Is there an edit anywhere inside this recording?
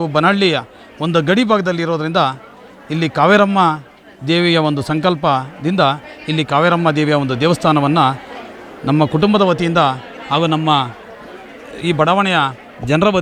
no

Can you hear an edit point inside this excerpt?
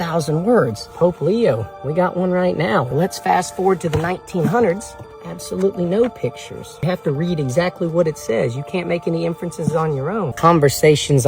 yes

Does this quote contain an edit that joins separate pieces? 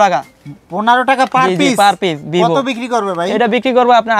no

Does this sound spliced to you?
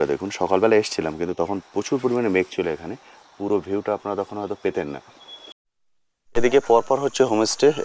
yes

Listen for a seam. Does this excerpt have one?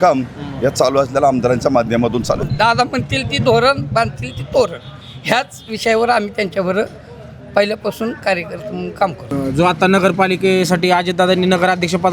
yes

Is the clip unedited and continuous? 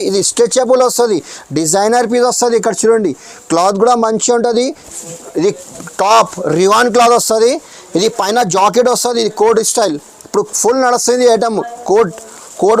no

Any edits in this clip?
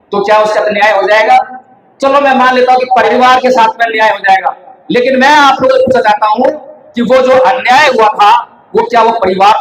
yes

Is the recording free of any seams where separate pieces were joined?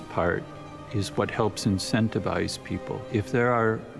no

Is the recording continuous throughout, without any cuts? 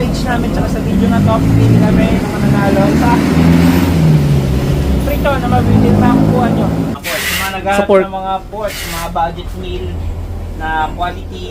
no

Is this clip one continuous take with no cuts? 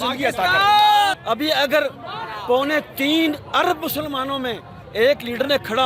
no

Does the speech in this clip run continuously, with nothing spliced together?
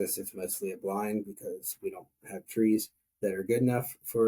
yes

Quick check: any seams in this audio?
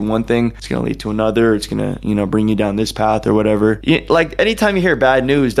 yes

